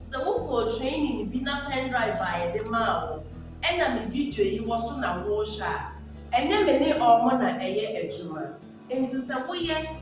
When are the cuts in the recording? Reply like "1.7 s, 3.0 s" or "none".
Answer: none